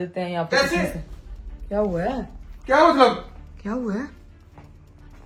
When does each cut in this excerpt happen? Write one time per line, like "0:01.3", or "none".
none